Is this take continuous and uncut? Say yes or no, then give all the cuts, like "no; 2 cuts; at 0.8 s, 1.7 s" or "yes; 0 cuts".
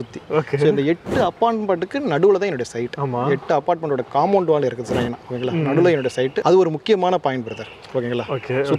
yes; 0 cuts